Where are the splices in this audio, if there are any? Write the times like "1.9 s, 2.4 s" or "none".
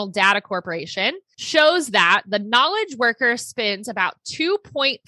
1.3 s